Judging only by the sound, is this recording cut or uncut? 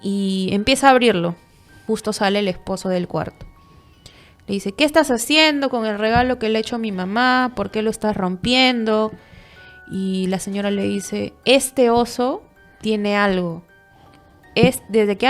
cut